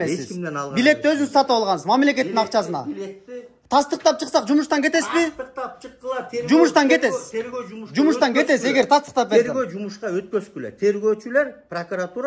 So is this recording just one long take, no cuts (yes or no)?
yes